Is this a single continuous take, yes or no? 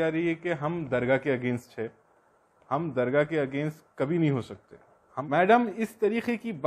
no